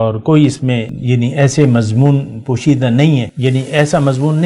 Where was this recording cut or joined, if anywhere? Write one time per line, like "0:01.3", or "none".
0:00.9
0:03.3